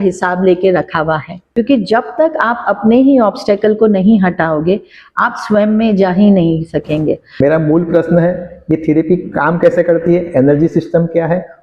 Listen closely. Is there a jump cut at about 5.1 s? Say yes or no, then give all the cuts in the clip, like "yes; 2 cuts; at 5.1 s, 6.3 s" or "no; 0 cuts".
no; 2 cuts; at 1.5 s, 7.3 s